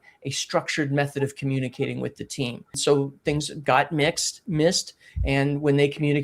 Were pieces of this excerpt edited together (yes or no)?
yes